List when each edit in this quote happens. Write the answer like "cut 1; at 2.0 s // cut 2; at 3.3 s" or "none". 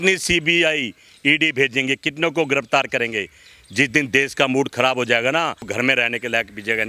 cut 1; at 5.6 s